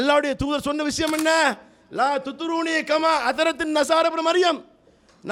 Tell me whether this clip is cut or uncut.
uncut